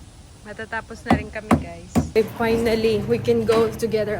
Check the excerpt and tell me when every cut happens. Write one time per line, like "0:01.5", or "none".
0:02.2